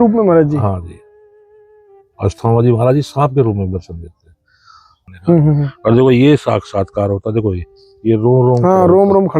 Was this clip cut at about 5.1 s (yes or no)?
yes